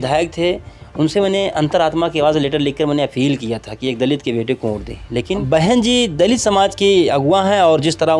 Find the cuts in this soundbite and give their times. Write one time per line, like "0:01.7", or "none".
0:05.4